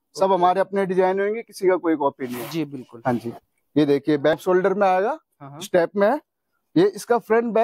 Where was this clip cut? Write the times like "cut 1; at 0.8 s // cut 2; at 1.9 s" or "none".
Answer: cut 1; at 4.4 s

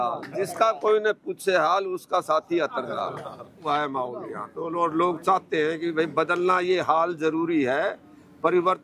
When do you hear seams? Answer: cut 1; at 3.7 s

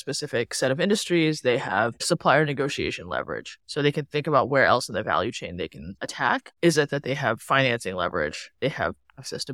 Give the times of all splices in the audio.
none

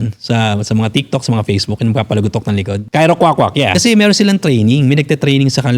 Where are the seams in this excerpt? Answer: cut 1; at 2.8 s // cut 2; at 3.7 s

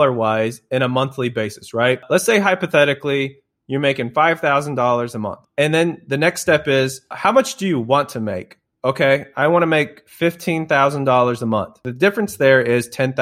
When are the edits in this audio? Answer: cut 1; at 2.0 s // cut 2; at 5.4 s // cut 3; at 7.2 s // cut 4; at 11.8 s

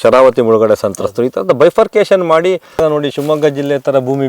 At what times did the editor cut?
cut 1; at 2.7 s

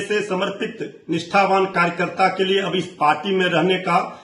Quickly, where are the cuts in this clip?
none

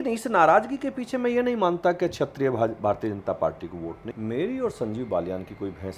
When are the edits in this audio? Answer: cut 1; at 4.0 s

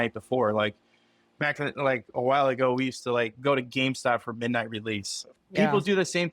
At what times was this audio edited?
cut 1; at 5.3 s

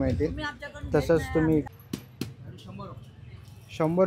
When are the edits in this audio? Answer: cut 1; at 1.7 s

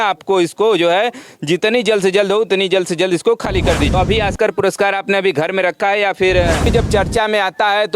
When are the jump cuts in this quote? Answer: cut 1; at 3.9 s // cut 2; at 6.7 s

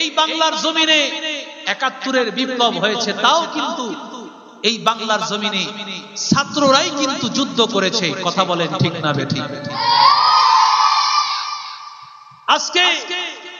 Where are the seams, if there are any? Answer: none

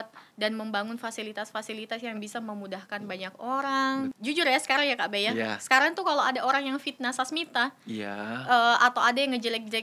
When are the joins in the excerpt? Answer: cut 1; at 4.2 s

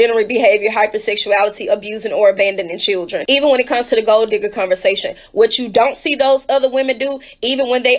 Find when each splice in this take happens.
none

